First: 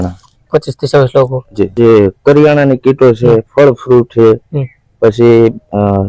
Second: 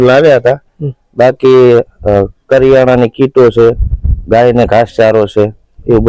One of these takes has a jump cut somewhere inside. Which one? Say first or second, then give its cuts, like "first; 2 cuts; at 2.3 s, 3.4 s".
first; 1 cut; at 1.6 s